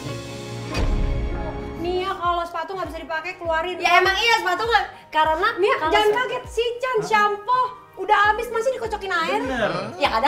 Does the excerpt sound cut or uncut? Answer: cut